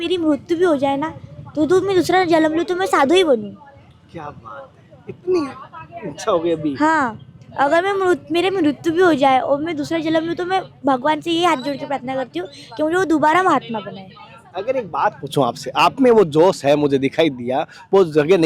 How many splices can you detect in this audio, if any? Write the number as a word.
zero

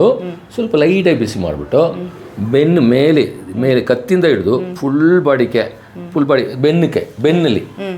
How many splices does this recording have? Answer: zero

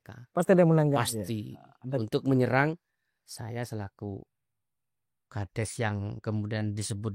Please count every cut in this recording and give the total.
zero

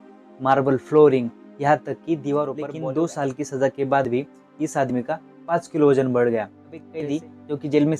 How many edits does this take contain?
two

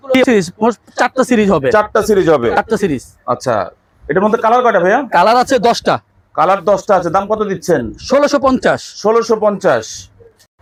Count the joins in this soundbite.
zero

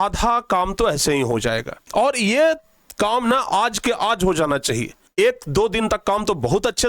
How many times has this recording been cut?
two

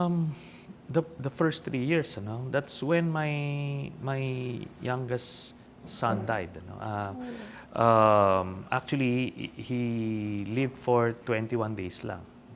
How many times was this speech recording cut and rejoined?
zero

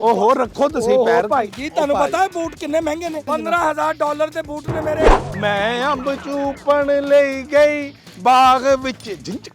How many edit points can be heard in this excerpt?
two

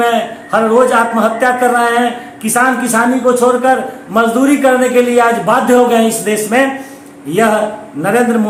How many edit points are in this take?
zero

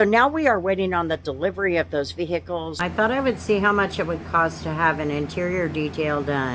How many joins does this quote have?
one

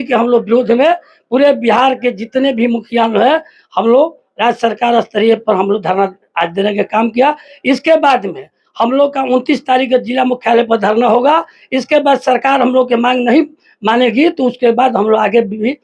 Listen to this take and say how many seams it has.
zero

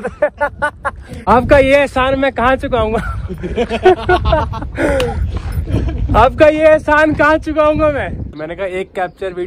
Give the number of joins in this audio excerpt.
two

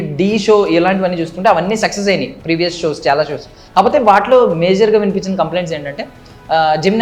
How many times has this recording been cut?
zero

